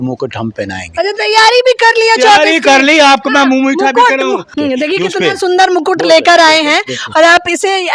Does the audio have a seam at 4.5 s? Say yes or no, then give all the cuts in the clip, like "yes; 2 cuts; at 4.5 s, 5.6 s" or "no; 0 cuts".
yes; 1 cut; at 4.5 s